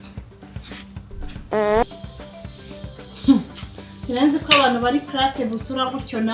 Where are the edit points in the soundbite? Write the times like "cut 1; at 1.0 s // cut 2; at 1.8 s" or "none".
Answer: cut 1; at 1.8 s